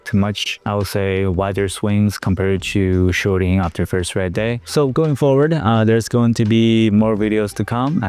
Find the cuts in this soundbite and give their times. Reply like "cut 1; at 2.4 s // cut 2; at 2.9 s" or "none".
none